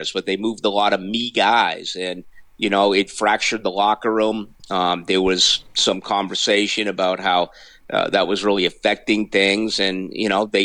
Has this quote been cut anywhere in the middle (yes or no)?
no